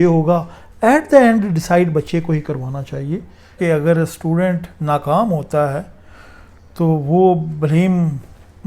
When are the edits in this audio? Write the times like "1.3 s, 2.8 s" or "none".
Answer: 3.6 s

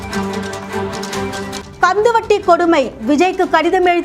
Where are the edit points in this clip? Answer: 1.6 s

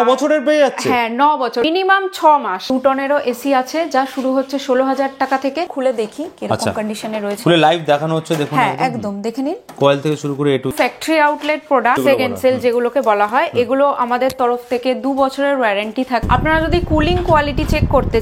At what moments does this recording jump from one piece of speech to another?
1.6 s, 2.7 s, 5.7 s, 10.7 s, 12.0 s, 16.2 s

